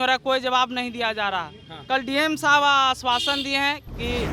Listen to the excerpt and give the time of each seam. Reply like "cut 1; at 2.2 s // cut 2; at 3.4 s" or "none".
none